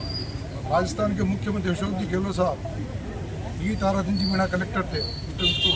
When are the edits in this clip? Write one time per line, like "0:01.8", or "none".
none